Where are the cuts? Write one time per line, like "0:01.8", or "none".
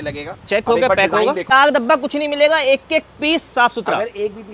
0:01.5